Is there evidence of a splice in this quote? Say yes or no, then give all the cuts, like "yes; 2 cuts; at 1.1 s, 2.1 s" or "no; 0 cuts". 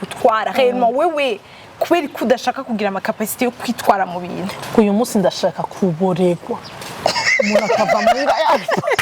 no; 0 cuts